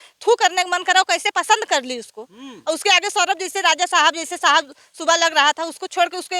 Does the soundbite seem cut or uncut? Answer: uncut